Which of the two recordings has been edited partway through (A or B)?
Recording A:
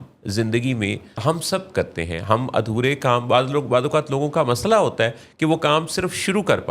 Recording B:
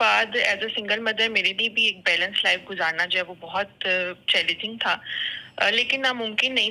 A